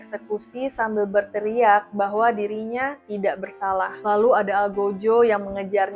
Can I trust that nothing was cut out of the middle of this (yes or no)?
yes